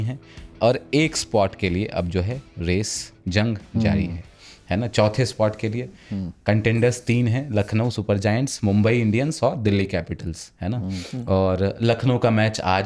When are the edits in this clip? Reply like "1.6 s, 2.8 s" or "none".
none